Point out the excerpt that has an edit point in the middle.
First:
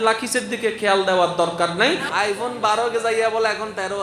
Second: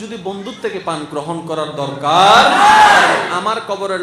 first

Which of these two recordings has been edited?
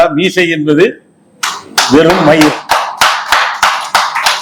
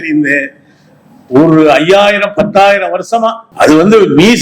second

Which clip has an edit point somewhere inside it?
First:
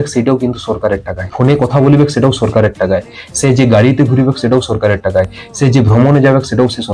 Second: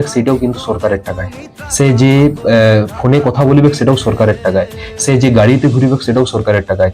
first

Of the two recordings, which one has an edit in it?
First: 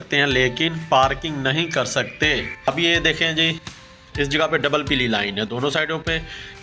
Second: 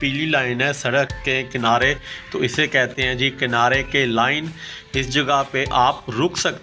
first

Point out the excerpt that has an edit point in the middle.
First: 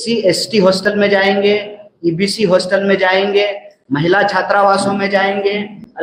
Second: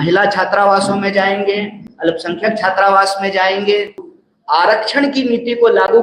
second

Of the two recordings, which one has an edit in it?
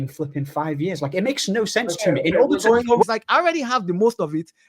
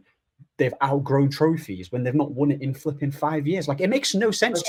first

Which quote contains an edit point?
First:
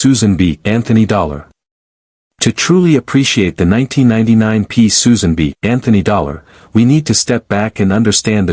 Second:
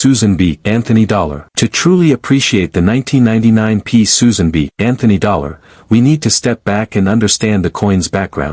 second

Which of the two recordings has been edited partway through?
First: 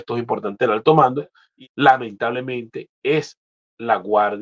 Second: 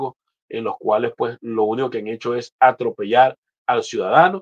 first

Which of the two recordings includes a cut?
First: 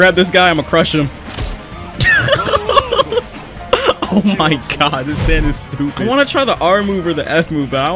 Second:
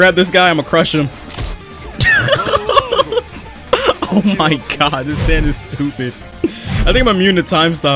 first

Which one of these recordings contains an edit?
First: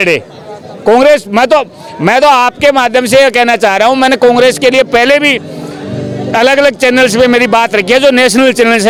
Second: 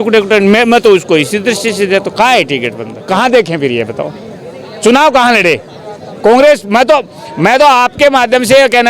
second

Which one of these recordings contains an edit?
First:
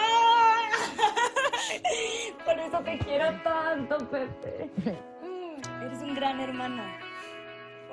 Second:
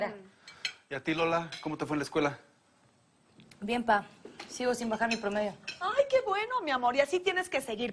second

